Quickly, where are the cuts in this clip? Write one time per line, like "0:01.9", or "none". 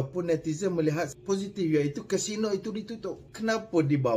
0:01.1
0:03.3